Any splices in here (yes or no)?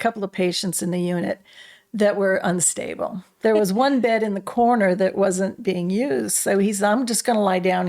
yes